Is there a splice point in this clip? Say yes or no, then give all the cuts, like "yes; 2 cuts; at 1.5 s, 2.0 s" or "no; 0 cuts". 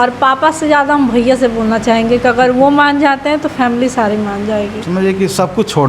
yes; 1 cut; at 4.8 s